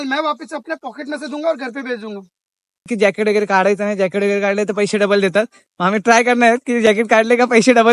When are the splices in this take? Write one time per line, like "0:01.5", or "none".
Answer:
0:02.9

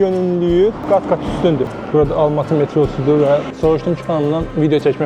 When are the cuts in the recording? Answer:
0:01.7
0:03.5

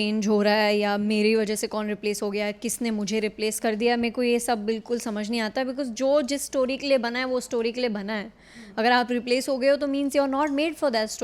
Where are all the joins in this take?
none

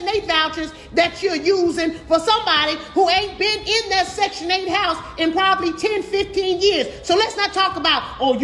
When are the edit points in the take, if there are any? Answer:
none

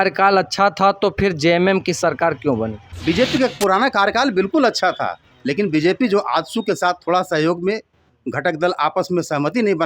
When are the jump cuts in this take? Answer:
0:02.8

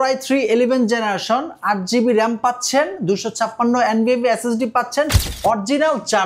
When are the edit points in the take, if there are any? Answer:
0:05.1

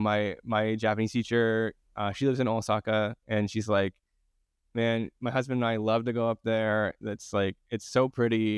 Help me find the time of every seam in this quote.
none

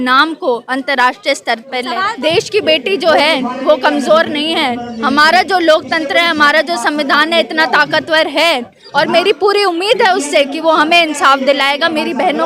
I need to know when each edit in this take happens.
0:02.0

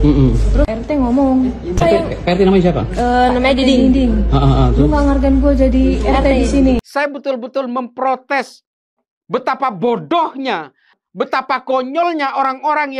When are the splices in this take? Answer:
0:06.8
0:11.0

